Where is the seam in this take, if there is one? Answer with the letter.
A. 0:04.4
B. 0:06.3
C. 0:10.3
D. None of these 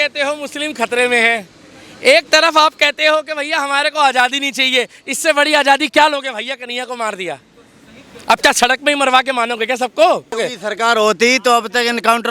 C